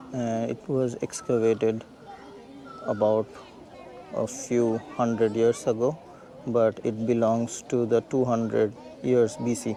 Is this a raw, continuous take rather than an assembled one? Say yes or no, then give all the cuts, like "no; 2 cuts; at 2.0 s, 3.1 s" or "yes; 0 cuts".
yes; 0 cuts